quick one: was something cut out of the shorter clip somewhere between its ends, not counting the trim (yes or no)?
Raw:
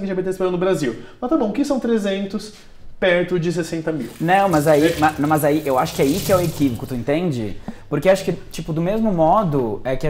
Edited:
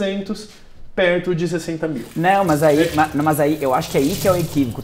no